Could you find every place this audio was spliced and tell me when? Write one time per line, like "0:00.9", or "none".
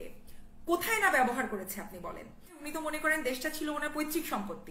0:02.6